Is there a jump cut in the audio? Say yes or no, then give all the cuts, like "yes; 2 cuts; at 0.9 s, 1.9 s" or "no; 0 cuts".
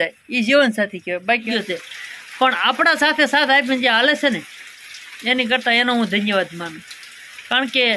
yes; 1 cut; at 1.5 s